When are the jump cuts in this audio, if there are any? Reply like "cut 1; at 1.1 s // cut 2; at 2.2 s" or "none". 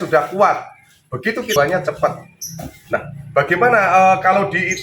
cut 1; at 1.5 s